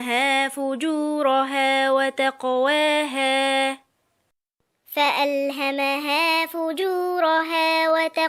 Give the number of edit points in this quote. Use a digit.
0